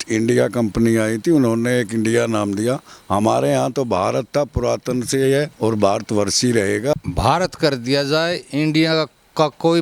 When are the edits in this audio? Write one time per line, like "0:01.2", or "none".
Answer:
0:05.5
0:06.9